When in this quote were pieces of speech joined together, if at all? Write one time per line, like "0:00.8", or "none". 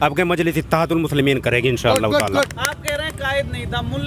none